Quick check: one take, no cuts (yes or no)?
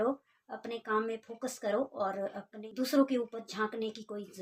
yes